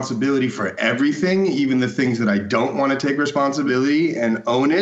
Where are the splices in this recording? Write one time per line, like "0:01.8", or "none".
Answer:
0:03.7